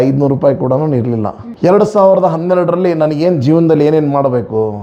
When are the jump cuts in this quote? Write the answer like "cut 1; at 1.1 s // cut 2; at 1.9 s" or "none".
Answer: cut 1; at 1.4 s